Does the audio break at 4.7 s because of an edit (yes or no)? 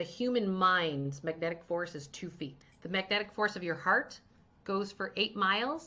no